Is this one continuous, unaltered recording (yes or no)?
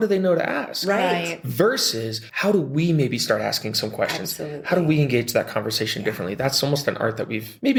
yes